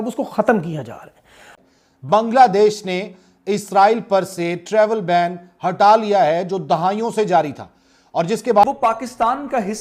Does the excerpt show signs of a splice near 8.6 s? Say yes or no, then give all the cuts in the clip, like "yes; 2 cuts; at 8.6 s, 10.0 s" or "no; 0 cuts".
yes; 2 cuts; at 1.5 s, 8.6 s